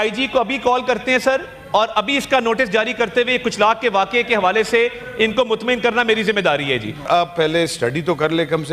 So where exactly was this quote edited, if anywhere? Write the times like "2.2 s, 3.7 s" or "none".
7.1 s